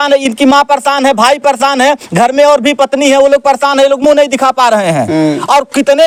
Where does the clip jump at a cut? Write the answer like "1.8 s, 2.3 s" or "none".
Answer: none